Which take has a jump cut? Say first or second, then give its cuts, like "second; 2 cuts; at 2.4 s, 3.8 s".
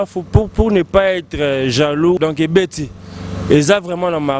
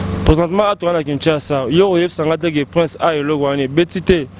first; 1 cut; at 2.2 s